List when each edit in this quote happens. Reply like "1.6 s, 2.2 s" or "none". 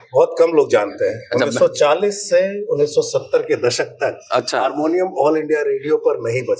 none